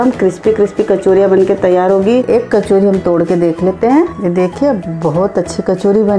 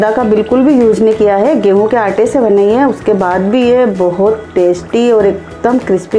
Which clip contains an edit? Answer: first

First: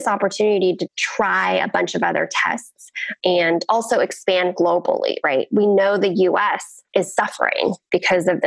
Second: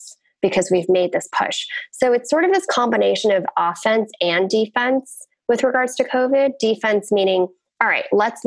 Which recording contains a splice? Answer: first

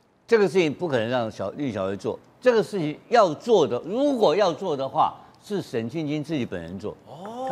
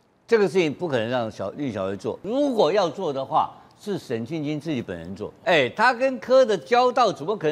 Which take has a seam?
second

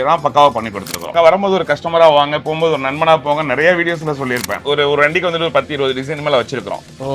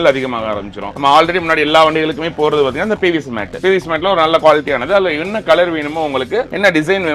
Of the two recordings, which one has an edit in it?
first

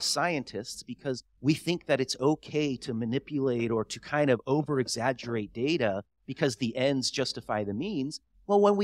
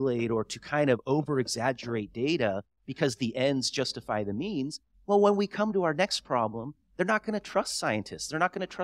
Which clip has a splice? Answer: first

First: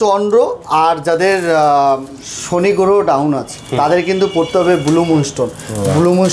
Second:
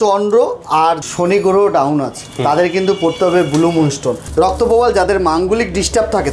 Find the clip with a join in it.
second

